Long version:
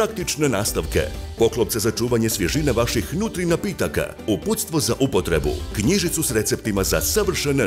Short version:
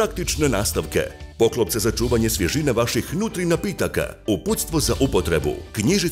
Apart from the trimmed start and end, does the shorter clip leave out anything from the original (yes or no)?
no